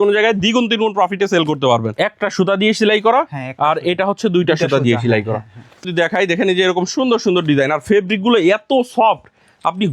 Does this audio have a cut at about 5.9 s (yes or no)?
yes